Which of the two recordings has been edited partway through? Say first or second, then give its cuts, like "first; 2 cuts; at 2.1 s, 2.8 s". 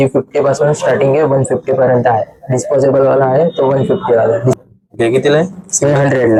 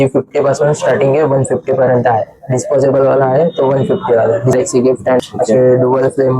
second; 1 cut; at 4.8 s